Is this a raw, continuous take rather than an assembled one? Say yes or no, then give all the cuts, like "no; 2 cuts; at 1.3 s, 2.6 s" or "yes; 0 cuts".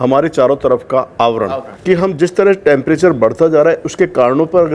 no; 1 cut; at 1.7 s